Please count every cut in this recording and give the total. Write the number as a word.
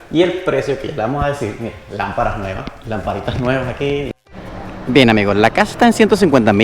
one